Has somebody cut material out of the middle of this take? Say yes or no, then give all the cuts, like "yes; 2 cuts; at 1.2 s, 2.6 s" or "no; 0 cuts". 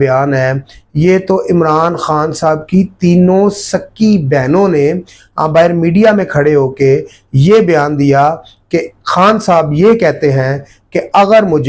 no; 0 cuts